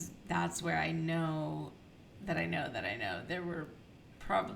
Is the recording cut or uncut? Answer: uncut